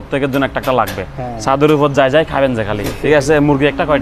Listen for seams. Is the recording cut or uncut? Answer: uncut